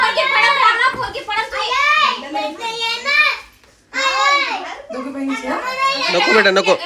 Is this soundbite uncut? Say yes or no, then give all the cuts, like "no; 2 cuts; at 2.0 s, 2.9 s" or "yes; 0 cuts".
yes; 0 cuts